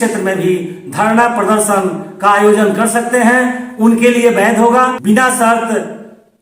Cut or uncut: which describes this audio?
cut